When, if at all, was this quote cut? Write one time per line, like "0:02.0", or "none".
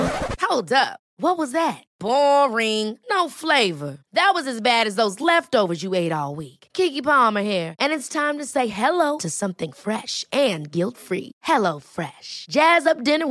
none